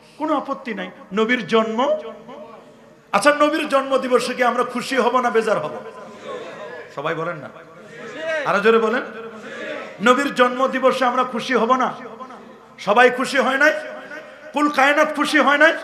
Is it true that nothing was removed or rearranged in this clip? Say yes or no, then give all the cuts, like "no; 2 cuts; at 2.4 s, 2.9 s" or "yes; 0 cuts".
yes; 0 cuts